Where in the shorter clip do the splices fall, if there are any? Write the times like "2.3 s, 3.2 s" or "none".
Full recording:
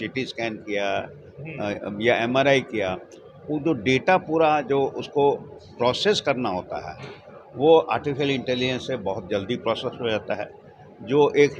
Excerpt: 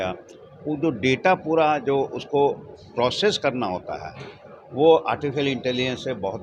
none